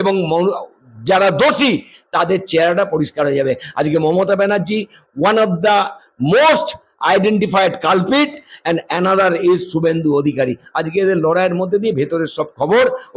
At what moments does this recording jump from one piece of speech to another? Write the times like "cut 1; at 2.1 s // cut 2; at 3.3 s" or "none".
none

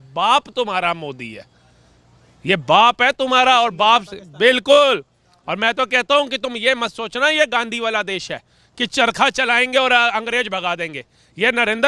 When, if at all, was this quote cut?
none

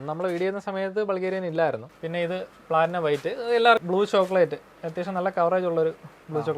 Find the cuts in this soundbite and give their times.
cut 1; at 1.9 s // cut 2; at 3.8 s

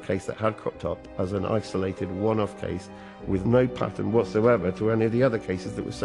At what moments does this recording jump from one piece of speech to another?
none

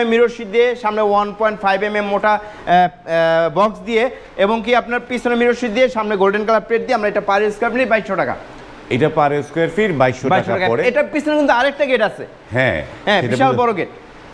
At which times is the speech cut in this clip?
none

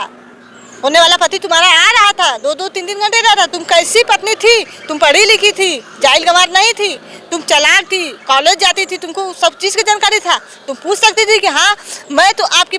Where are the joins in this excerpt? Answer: none

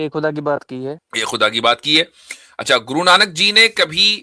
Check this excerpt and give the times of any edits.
cut 1; at 1.1 s

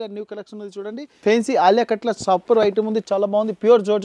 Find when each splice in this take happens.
cut 1; at 1.2 s

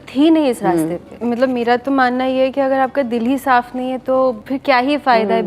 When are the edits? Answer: cut 1; at 1.1 s // cut 2; at 4.5 s

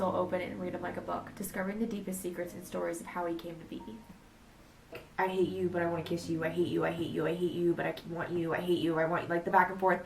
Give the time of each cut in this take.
cut 1; at 5.0 s

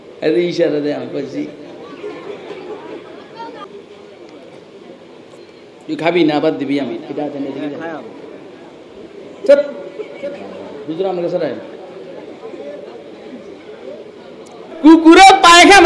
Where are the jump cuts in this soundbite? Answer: cut 1; at 3.7 s

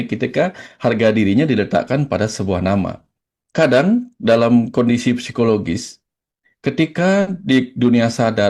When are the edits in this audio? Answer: cut 1; at 3.4 s

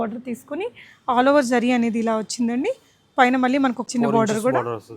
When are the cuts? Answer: cut 1; at 3.9 s

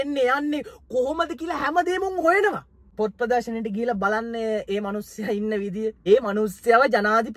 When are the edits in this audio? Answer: cut 1; at 2.9 s // cut 2; at 6.0 s

